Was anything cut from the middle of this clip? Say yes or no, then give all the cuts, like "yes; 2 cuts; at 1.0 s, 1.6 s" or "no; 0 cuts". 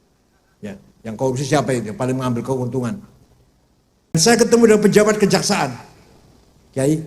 yes; 1 cut; at 4.1 s